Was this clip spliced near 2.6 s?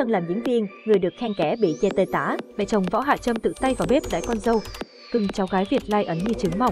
yes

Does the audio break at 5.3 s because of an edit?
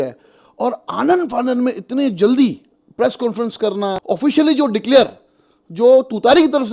no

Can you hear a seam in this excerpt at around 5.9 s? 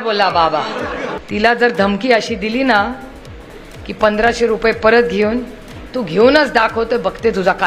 no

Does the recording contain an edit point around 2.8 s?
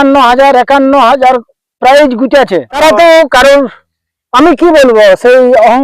yes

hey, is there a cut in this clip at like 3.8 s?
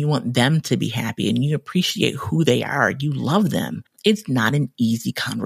yes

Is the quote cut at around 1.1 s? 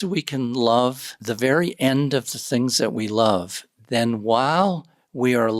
yes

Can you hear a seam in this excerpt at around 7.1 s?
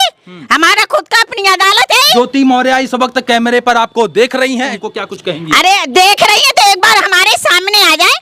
no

